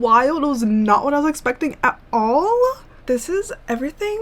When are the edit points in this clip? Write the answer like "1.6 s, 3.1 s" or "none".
2.9 s

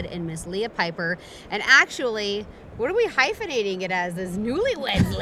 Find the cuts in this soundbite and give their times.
none

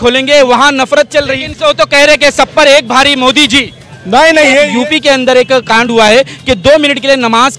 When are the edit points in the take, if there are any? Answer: 1.4 s, 4.7 s

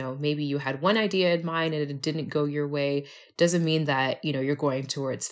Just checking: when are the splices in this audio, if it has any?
none

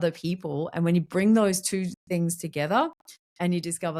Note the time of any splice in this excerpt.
none

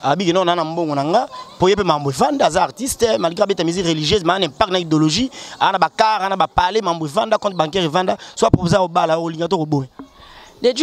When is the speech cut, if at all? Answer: none

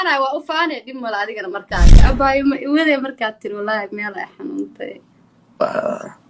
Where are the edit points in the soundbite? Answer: 2.1 s

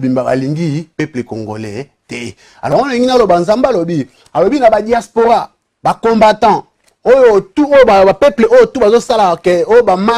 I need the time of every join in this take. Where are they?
2.7 s

